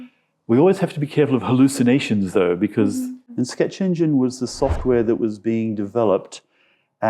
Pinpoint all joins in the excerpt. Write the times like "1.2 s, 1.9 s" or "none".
3.2 s